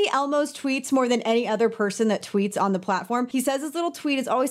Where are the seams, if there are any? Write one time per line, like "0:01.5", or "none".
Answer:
0:03.3